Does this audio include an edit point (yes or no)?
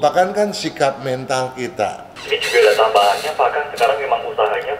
yes